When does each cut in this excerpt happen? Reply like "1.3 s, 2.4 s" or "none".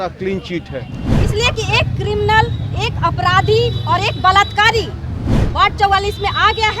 1.1 s